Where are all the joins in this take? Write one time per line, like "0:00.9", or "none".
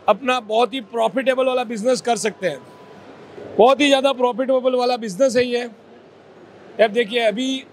none